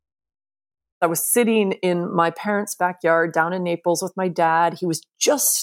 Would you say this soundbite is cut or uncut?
cut